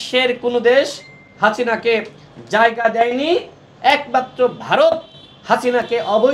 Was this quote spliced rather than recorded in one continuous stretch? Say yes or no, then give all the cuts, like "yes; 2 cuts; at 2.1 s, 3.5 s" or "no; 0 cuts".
no; 0 cuts